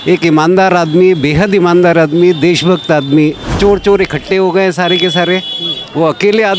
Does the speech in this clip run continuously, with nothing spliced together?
no; 1 cut; at 3.5 s

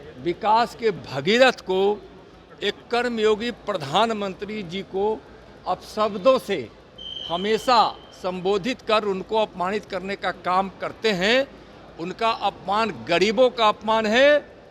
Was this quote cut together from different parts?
no; 0 cuts

